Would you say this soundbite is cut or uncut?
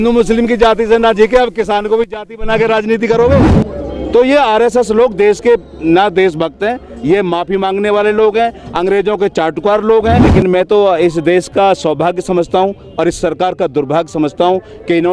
cut